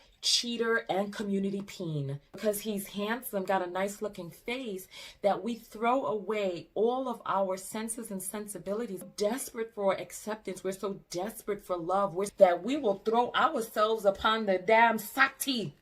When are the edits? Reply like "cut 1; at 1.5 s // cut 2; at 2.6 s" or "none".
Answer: cut 1; at 2.4 s // cut 2; at 9.1 s // cut 3; at 12.3 s